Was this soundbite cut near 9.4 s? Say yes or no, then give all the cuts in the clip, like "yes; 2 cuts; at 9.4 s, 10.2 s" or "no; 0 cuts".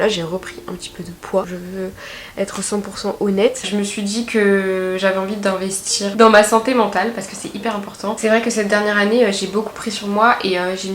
no; 4 cuts; at 1.5 s, 3.6 s, 6.1 s, 8.2 s